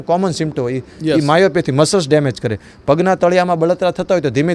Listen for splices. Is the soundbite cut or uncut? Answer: uncut